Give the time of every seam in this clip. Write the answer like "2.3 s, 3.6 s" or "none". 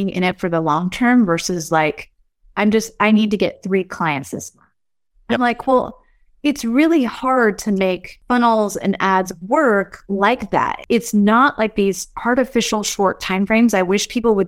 8.1 s, 10.8 s